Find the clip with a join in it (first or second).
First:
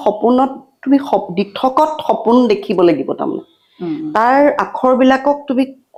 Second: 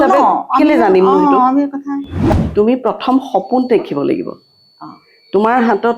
second